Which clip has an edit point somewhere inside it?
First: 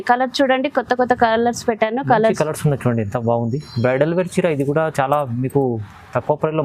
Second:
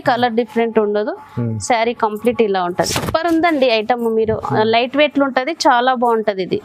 second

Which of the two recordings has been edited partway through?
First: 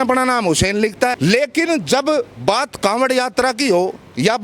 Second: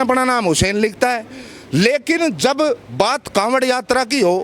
first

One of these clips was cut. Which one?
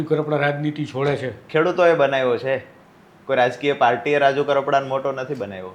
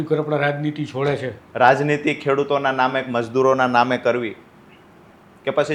second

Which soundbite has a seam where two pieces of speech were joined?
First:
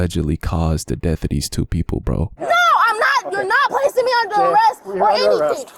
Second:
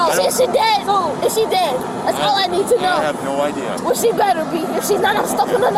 first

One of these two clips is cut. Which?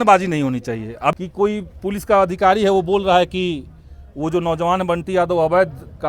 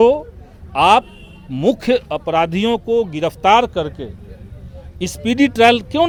first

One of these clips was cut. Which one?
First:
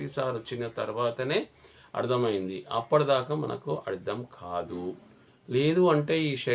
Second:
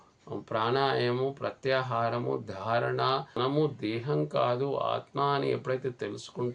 second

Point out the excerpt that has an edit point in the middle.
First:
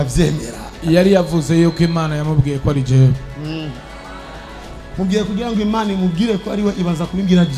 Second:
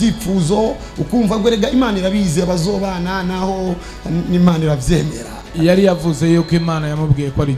first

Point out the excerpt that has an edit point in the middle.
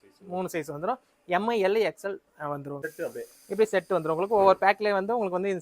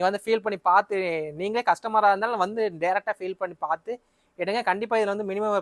first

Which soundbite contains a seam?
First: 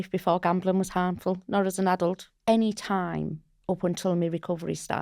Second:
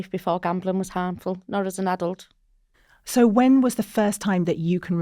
first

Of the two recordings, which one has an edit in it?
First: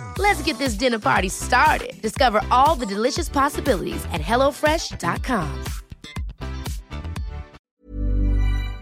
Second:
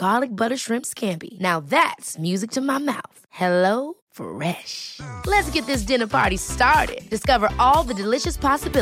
first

